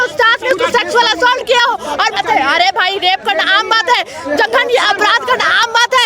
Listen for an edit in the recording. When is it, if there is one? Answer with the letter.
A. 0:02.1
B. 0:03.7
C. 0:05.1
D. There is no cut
A